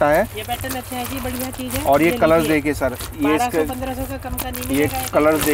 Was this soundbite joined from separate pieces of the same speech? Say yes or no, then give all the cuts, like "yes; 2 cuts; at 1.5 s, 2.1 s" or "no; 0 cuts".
no; 0 cuts